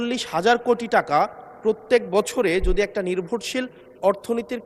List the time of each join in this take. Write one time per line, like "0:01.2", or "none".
none